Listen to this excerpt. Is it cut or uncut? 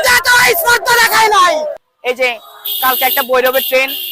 cut